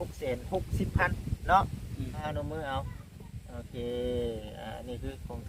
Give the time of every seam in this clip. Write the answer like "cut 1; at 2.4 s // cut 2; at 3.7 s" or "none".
cut 1; at 2.2 s